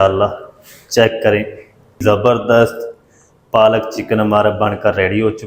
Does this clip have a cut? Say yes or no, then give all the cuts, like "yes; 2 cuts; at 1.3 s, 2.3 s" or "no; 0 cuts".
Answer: yes; 1 cut; at 2.0 s